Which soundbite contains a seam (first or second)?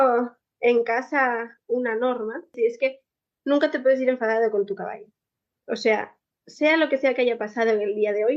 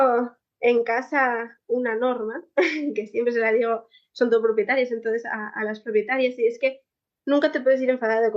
first